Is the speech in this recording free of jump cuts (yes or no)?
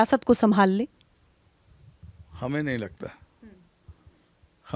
yes